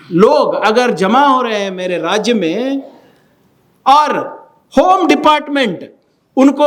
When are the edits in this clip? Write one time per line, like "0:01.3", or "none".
none